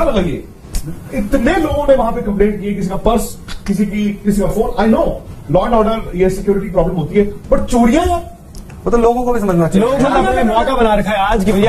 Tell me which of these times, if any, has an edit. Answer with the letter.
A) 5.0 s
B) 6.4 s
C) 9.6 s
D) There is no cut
D